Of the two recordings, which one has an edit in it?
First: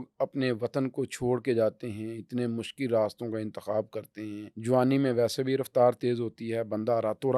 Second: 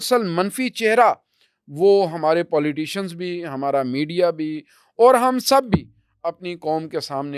first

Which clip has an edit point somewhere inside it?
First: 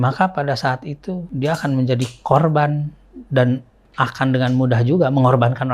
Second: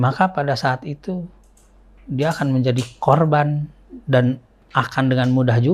first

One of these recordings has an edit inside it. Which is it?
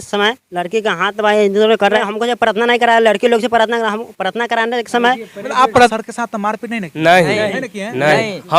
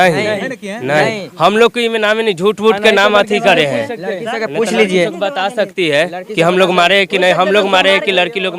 first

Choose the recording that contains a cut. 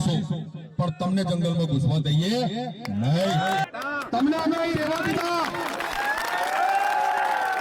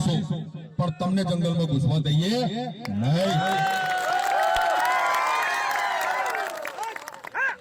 first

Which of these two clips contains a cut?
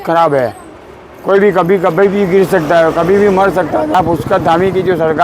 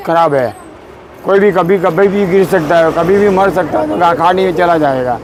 first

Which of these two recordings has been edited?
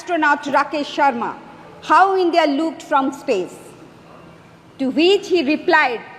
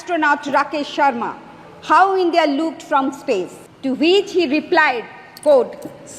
second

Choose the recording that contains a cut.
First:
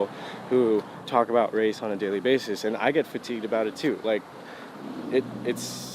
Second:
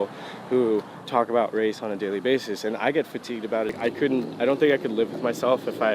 second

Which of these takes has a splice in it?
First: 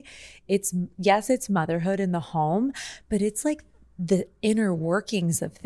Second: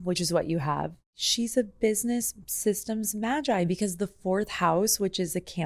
second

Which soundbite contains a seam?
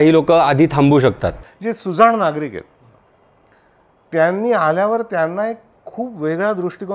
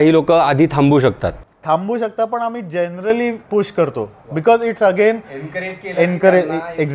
first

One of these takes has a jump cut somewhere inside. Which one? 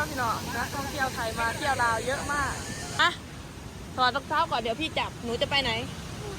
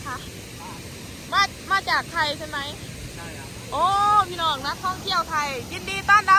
first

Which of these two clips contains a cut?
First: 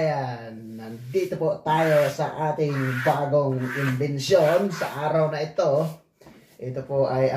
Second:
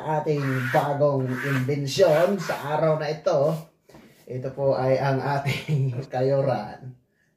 second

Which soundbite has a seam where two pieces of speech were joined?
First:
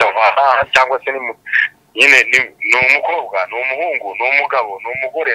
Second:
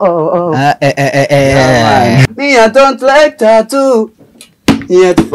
second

